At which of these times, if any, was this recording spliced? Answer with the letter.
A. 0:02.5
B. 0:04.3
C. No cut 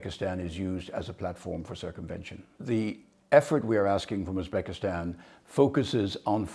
A